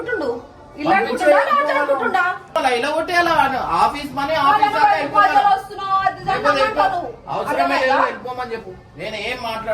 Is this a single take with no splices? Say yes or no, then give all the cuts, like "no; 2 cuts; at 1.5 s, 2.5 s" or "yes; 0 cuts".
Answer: no; 1 cut; at 2.6 s